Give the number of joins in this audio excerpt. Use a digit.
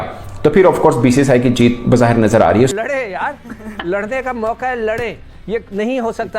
1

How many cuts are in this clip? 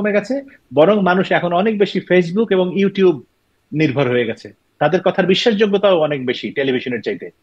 1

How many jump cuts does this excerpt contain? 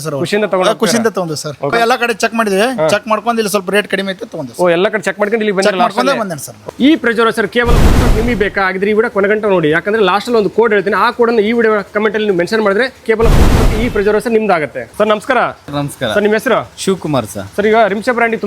2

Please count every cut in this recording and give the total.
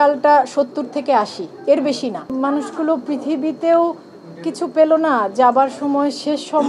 1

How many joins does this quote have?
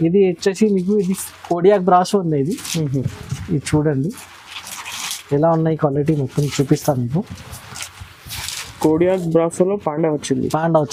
0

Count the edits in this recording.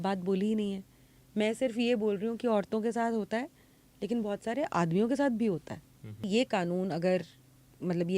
1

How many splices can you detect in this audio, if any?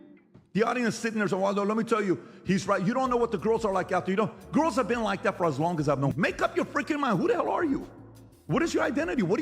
1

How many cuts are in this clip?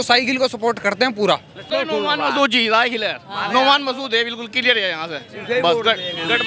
1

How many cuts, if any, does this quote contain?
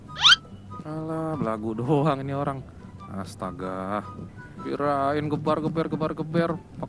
1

